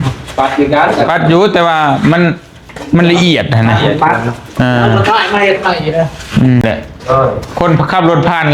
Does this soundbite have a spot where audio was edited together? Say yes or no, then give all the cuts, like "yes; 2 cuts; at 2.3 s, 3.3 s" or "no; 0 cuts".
yes; 1 cut; at 6.6 s